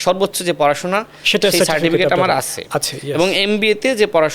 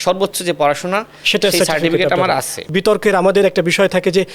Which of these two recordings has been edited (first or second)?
second